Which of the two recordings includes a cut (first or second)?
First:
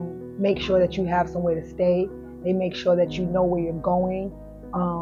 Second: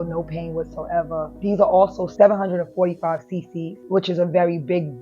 second